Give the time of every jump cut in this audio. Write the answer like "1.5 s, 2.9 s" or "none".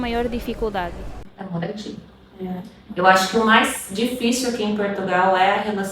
1.1 s